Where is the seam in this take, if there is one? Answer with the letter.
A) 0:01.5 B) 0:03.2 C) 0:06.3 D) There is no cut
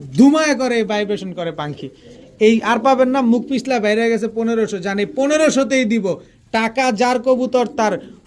D